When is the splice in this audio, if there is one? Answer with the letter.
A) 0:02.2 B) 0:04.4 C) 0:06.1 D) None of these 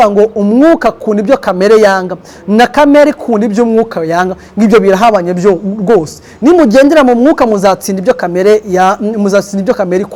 D